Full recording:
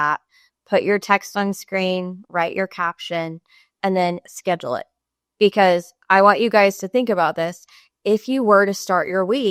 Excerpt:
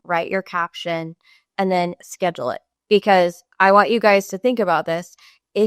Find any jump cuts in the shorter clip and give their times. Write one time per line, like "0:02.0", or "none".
0:02.7